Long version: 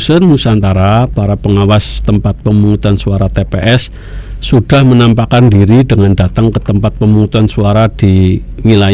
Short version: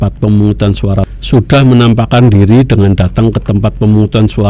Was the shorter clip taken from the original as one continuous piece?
no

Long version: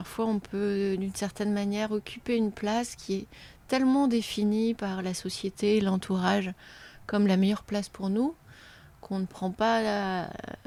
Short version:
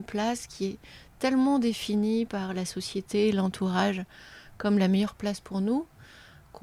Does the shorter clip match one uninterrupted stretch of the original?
yes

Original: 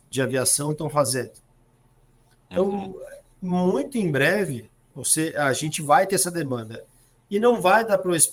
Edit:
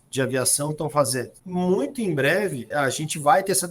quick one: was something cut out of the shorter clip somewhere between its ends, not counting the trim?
yes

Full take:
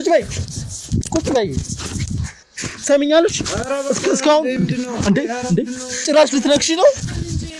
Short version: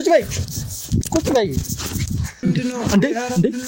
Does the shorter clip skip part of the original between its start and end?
yes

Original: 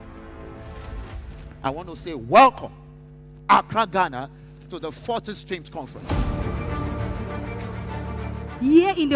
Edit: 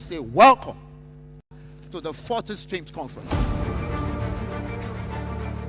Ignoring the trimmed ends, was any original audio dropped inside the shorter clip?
yes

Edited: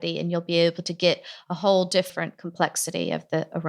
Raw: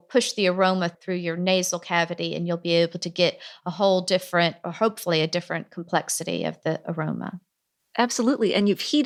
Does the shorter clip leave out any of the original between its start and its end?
yes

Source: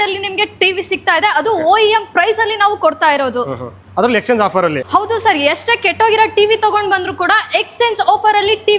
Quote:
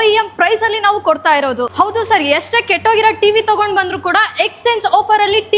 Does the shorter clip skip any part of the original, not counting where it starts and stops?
yes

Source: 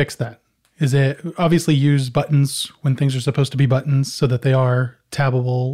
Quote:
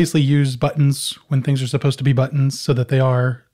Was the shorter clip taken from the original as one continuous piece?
yes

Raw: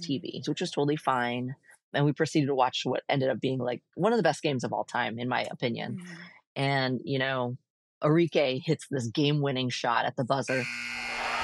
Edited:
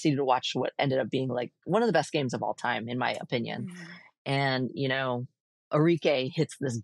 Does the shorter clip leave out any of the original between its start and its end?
no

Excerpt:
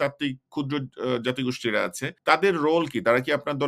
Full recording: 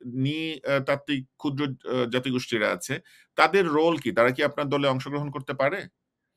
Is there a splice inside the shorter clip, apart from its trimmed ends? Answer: yes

